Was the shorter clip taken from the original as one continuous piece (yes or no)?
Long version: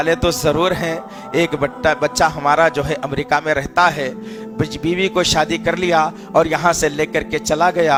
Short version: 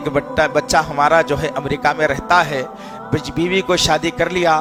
yes